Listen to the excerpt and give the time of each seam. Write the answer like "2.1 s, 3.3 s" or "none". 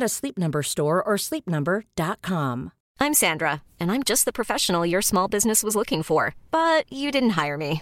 2.8 s